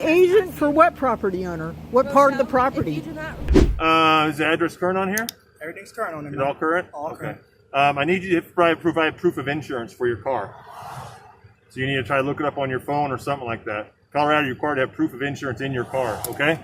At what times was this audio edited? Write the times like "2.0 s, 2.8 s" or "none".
3.5 s